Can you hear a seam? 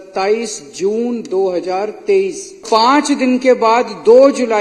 yes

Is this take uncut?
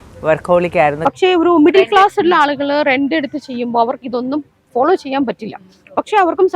no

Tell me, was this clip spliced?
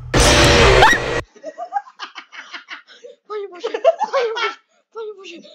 yes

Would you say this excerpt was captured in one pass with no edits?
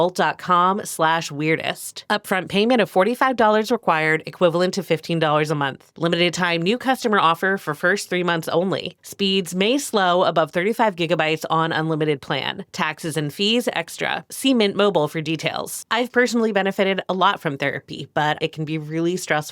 no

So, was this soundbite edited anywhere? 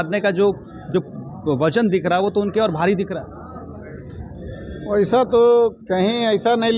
yes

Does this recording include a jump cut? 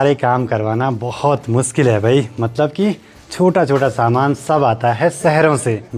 no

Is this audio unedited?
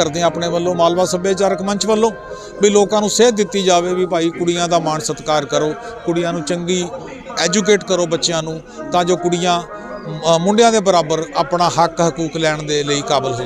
yes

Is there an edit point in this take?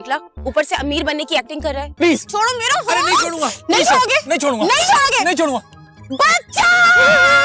yes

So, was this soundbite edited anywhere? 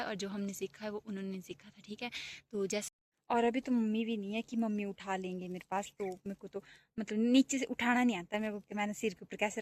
yes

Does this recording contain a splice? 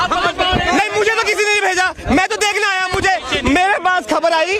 no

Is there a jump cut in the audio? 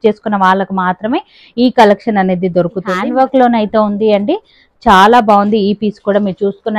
yes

